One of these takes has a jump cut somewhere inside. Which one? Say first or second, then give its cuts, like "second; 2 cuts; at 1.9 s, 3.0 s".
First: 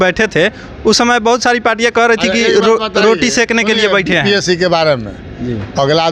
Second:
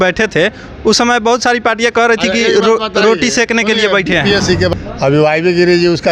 second; 1 cut; at 4.7 s